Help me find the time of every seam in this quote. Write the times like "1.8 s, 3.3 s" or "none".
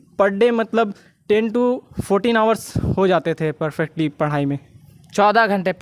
none